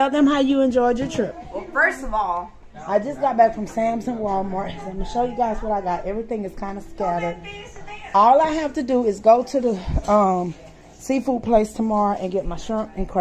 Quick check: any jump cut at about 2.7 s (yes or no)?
yes